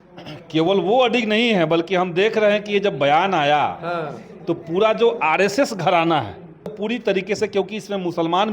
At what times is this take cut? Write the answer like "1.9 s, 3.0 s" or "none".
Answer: 6.7 s